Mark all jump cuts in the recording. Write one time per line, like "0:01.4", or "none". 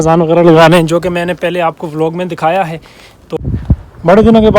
0:03.2

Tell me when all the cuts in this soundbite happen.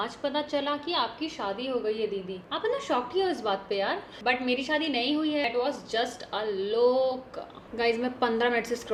none

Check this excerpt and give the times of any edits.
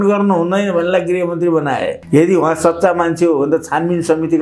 0:02.0

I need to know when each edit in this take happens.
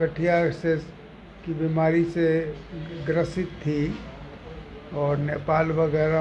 none

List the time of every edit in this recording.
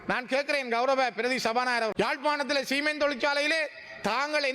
0:01.9

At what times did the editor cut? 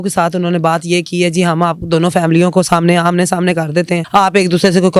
0:04.0

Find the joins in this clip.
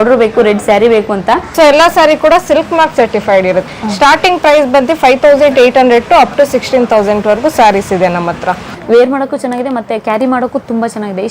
0:01.5
0:03.6
0:08.6

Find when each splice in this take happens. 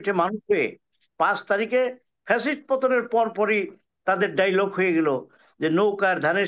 none

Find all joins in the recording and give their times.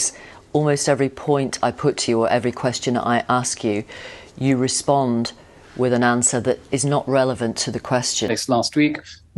0:08.3

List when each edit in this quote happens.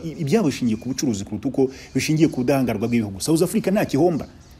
none

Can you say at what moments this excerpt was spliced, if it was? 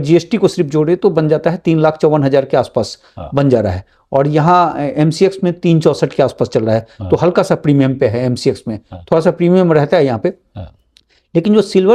none

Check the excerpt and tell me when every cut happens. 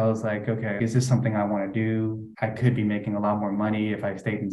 0:00.8
0:02.3

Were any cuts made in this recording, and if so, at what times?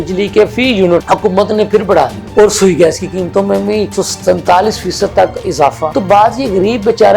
0:01.0
0:02.2
0:05.9

